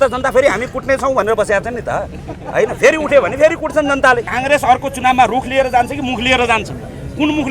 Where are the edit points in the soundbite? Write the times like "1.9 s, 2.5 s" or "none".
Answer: 4.3 s